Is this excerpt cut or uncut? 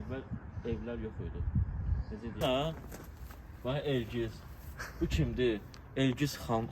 cut